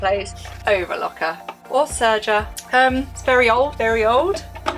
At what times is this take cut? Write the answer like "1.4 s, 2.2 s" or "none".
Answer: none

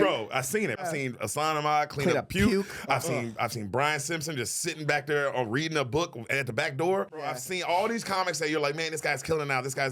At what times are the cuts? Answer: 0.8 s, 7.3 s

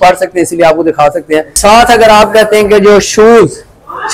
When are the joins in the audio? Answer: 1.6 s

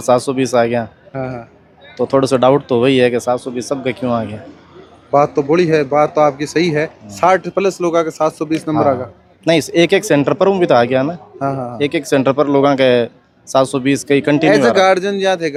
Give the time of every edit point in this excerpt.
none

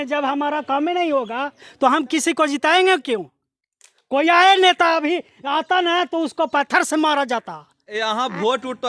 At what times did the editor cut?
7.9 s

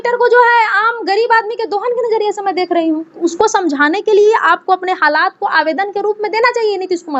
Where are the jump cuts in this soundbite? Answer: 3.1 s

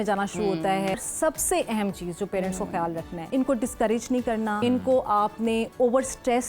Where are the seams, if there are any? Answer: 1.0 s, 3.2 s, 4.6 s

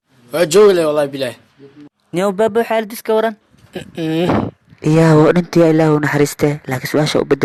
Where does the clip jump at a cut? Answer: none

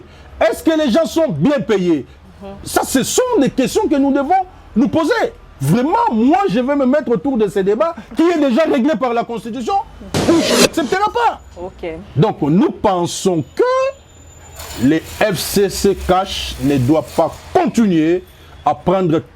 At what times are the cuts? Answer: 10.5 s

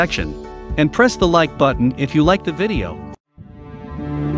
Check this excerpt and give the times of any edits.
3.1 s

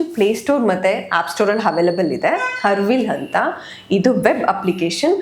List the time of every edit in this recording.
none

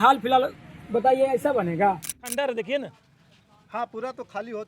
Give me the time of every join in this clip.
2.3 s

